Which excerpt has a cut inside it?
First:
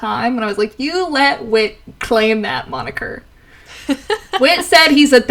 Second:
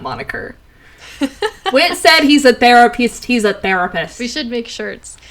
second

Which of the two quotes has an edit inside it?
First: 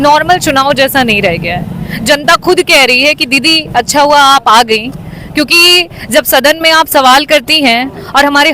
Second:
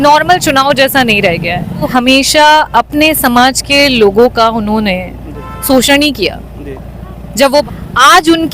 second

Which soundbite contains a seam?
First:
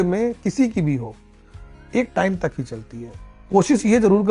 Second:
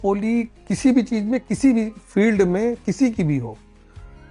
first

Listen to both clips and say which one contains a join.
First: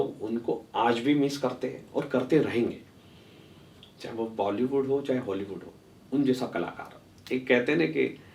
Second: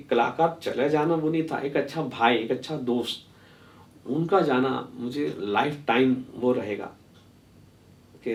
first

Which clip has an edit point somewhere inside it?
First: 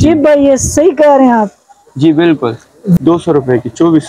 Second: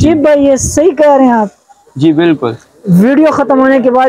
first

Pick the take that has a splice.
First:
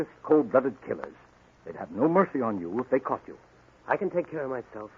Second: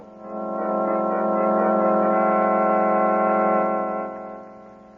second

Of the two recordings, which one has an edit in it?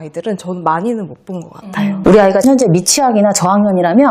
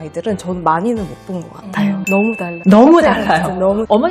second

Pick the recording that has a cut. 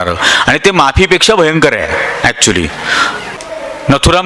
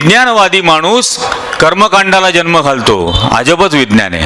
first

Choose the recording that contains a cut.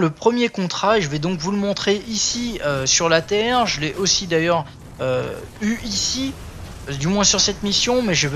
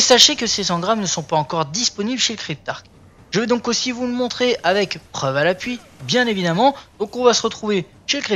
first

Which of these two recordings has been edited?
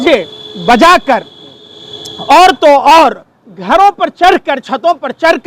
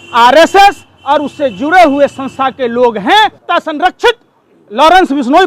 second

